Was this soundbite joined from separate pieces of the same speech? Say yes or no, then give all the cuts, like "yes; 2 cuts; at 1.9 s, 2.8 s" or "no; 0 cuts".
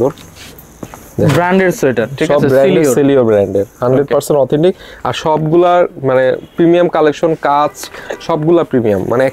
no; 0 cuts